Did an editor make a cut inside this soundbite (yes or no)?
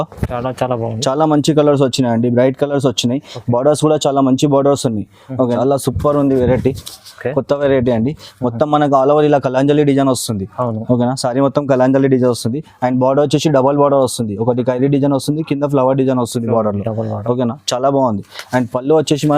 yes